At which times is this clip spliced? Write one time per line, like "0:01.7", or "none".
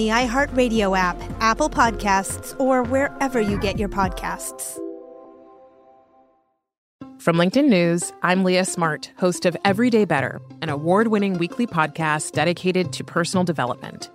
0:06.8